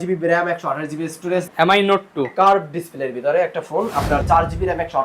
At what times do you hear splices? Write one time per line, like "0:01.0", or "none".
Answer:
0:01.5
0:04.2